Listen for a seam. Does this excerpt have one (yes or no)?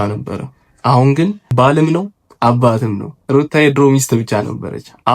yes